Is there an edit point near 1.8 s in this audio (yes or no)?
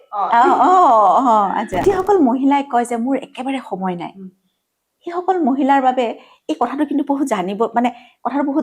yes